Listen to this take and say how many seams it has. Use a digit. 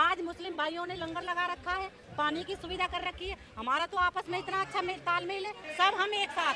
1